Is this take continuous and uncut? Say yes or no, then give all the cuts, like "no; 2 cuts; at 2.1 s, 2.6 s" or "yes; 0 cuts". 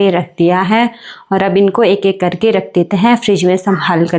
yes; 0 cuts